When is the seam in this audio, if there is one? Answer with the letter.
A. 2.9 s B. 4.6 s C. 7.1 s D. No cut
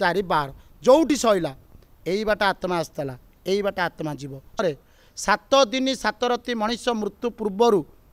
B